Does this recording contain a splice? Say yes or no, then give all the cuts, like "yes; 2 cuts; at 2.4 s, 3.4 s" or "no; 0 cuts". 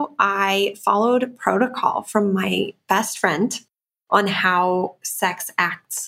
no; 0 cuts